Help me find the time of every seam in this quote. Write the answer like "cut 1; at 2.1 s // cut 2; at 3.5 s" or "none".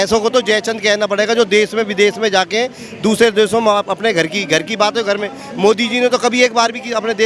none